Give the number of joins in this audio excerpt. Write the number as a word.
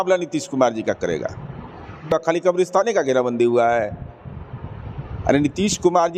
one